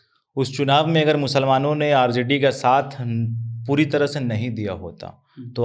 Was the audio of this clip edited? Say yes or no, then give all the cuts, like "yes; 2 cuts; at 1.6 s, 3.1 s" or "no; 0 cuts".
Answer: no; 0 cuts